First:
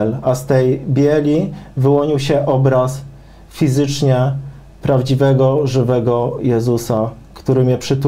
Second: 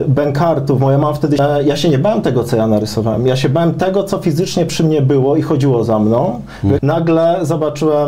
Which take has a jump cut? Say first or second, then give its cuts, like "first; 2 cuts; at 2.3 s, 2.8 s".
second; 2 cuts; at 1.4 s, 6.8 s